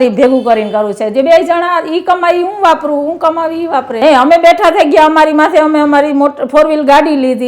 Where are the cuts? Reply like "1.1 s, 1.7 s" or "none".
3.9 s